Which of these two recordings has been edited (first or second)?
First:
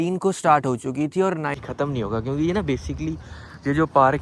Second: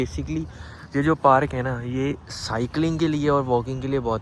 first